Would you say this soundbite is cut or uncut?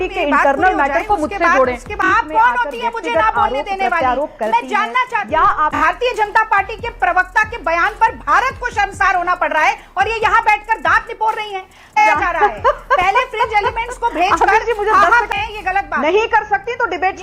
cut